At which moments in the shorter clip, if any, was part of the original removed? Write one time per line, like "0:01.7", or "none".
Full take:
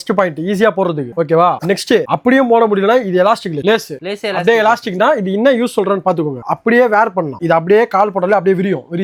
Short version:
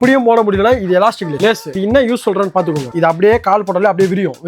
0:01.7
0:02.9